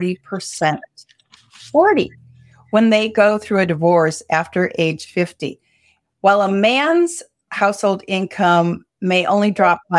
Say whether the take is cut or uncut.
uncut